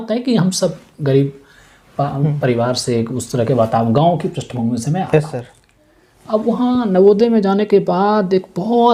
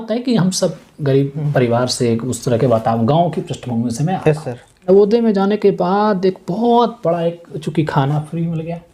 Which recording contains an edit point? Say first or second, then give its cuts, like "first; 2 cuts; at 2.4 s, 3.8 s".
second; 2 cuts; at 1.4 s, 4.9 s